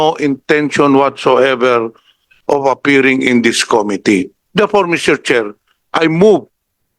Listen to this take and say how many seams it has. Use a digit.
1